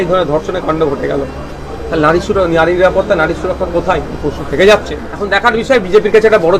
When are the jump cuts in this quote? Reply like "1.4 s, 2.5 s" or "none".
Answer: 5.3 s

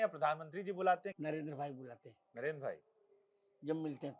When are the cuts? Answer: 1.1 s

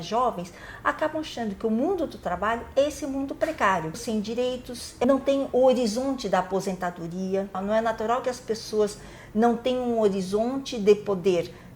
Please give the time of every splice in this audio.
4.4 s, 7.6 s

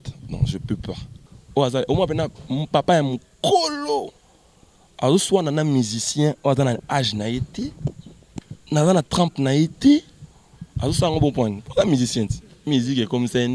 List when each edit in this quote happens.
1.2 s

